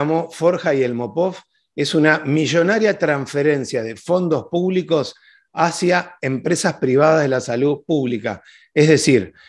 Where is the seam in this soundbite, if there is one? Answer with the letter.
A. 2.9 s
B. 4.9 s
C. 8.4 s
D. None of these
D